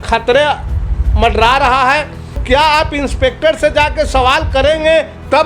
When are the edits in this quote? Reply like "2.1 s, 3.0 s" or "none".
2.4 s